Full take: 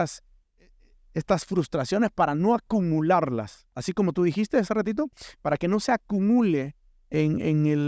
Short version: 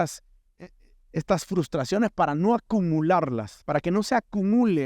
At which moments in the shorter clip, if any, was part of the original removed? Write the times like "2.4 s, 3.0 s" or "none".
3.5 s

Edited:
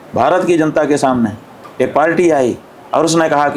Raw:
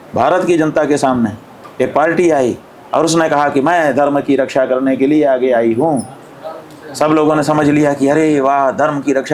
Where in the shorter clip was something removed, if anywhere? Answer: none

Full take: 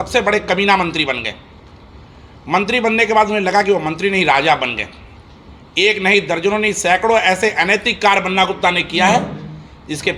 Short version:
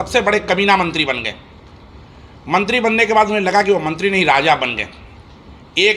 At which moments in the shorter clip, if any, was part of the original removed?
none

